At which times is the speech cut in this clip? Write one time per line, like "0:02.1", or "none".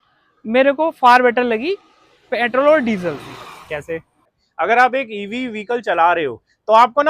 0:04.4